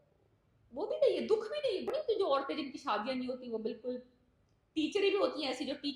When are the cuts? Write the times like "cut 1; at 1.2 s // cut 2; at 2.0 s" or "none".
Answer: cut 1; at 1.9 s